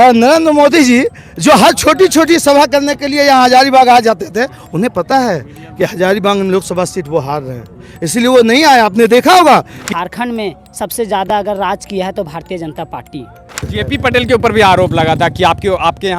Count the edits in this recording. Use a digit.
2